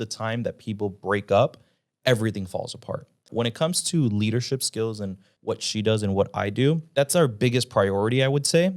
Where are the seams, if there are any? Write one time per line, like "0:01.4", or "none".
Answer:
0:03.3
0:05.3
0:06.9